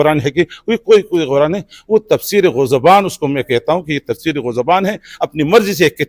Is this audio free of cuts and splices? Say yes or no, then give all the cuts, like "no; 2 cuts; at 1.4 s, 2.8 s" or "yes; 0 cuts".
yes; 0 cuts